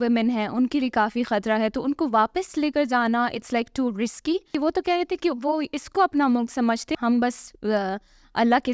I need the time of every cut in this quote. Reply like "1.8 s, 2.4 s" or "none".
4.6 s, 6.9 s